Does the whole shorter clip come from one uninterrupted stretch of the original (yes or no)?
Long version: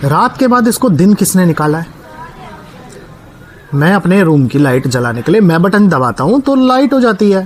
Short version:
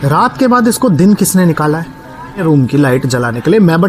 no